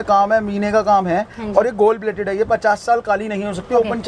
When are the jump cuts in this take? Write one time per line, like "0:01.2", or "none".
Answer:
none